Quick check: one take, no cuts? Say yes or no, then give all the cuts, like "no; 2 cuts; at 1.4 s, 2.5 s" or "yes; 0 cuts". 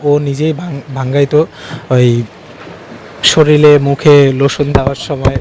yes; 0 cuts